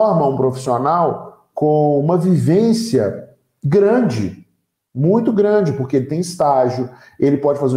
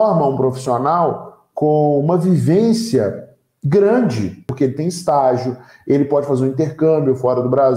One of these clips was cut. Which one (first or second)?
second